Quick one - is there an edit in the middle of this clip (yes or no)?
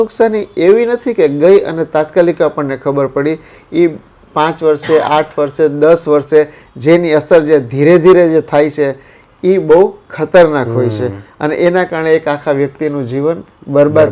no